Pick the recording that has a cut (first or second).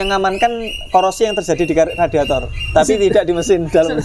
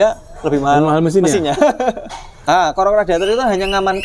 second